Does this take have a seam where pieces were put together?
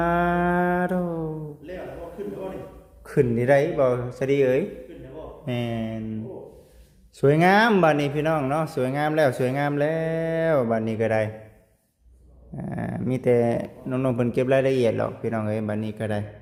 no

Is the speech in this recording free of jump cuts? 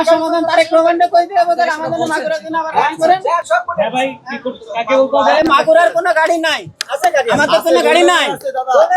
yes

